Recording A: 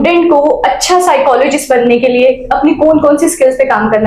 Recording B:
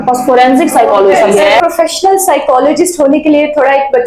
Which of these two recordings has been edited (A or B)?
B